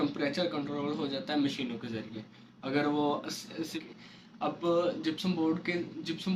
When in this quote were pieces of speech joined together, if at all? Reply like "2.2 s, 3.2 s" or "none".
3.7 s